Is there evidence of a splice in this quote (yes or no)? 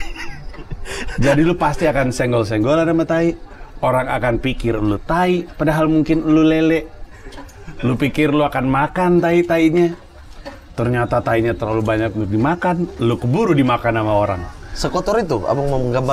no